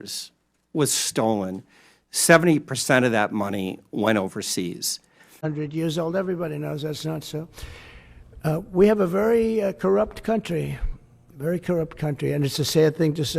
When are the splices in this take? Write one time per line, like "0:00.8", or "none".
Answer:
0:05.4